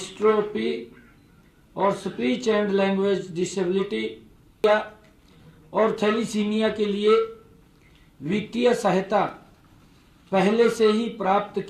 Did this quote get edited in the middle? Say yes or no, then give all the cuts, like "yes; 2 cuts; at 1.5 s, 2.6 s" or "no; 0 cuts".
yes; 1 cut; at 4.6 s